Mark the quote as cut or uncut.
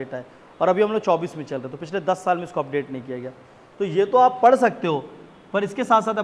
uncut